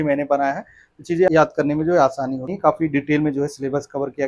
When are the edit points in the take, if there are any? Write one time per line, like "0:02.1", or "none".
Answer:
0:01.3
0:02.5